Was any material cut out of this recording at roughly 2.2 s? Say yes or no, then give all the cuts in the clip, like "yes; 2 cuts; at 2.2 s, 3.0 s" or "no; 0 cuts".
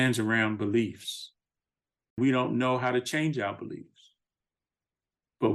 yes; 1 cut; at 2.2 s